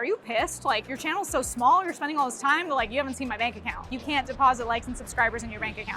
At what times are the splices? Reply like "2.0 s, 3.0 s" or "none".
3.9 s